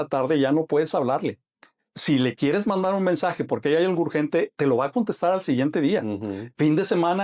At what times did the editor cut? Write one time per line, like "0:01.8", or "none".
none